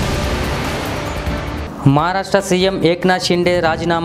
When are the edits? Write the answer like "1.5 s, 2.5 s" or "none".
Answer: 1.6 s